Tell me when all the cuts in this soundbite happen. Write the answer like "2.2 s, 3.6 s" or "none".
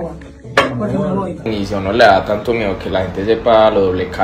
1.5 s